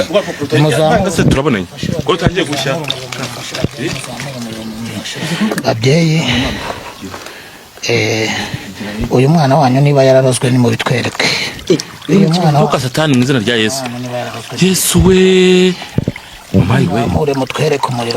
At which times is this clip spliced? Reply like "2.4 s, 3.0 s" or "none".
5.1 s